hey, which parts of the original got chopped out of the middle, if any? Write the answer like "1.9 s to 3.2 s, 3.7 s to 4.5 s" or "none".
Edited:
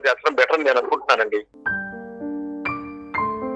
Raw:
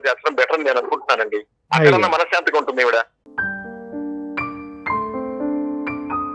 1.5 s to 3.3 s